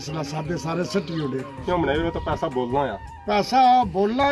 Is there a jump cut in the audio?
yes; 1 cut; at 1.6 s

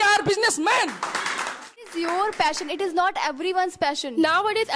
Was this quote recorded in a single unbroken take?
no; 1 cut; at 1.9 s

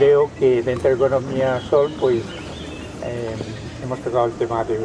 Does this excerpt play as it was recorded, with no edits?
yes; 0 cuts

